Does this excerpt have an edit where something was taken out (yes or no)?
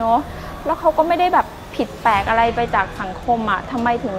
no